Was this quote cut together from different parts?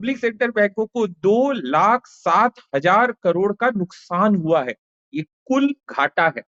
no; 0 cuts

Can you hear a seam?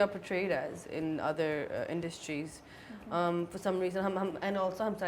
no; 0 cuts

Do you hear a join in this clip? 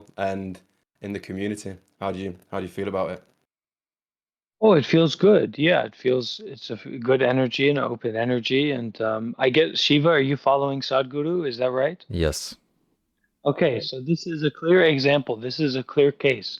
no; 0 cuts

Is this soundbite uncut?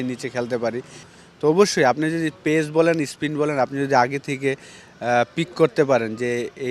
no; 1 cut; at 1.1 s

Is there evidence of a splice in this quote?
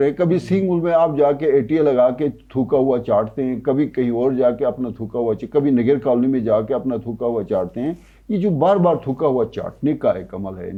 no; 0 cuts

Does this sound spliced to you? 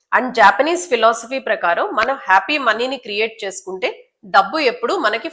no; 0 cuts

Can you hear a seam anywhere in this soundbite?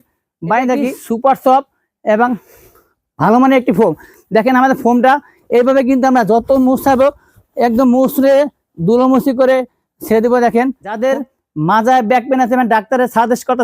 yes; 2 cuts; at 1.0 s, 11.0 s

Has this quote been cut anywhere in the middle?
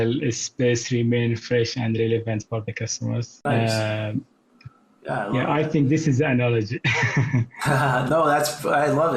yes; 1 cut; at 3.3 s

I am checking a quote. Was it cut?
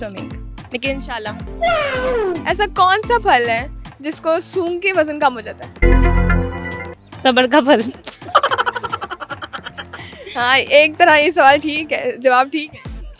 yes; 1 cut; at 2.4 s

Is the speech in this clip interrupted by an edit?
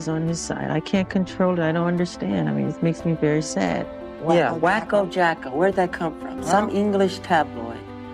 yes; 1 cut; at 3.9 s

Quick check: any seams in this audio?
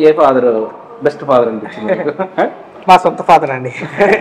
no; 0 cuts

